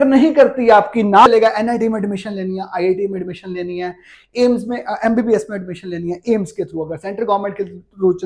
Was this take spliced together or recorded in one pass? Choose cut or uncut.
cut